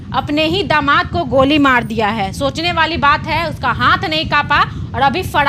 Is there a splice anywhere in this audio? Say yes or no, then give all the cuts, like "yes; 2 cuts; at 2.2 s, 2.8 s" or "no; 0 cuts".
no; 0 cuts